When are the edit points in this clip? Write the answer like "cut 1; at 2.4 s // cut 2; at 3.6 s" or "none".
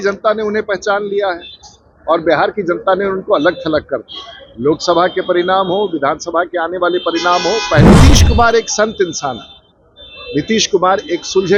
cut 1; at 7.9 s